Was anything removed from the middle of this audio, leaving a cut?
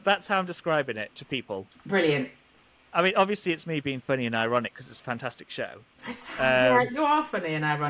no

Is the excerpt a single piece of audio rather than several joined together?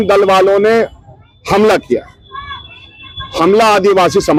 yes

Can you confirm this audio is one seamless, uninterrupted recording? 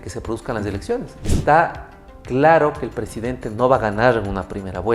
no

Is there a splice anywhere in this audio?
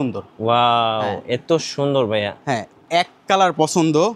yes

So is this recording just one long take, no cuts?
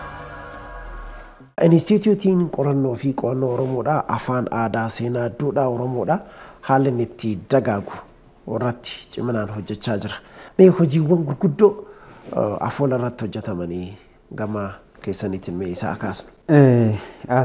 yes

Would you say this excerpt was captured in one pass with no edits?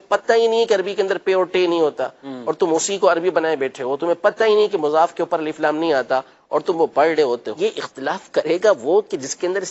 no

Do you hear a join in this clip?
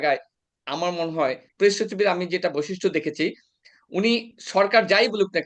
yes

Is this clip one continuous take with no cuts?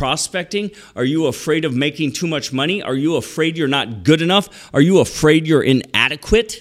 yes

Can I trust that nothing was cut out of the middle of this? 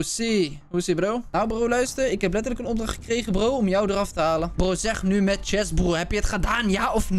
no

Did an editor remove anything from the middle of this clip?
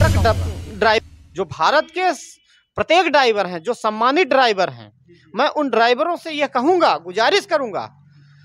yes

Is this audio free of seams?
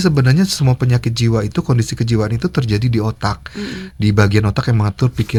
yes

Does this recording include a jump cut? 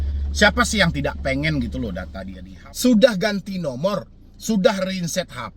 yes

